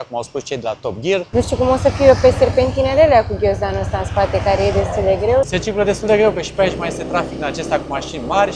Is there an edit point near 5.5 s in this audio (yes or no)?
yes